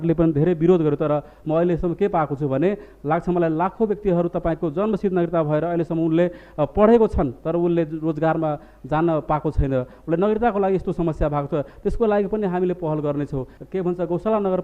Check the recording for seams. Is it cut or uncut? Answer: cut